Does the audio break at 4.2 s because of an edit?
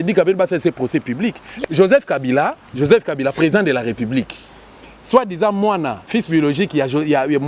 no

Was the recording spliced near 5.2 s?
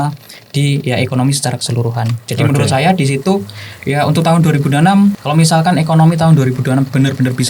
yes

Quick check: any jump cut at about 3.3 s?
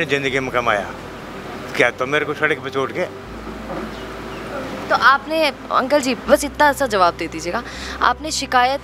no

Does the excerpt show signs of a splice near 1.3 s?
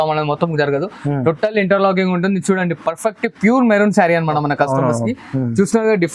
no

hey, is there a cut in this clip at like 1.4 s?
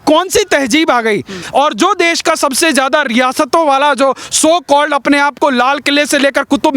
yes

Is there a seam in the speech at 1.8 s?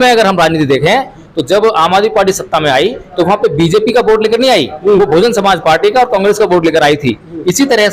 no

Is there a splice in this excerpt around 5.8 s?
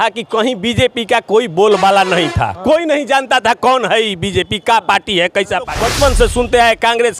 yes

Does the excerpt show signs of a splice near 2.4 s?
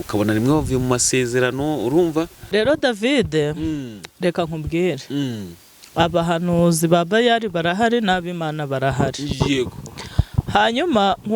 yes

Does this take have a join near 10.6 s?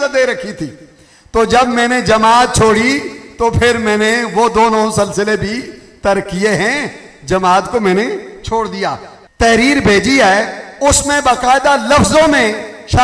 no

